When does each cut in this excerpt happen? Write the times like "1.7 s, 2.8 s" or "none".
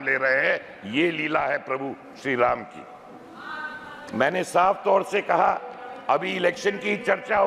none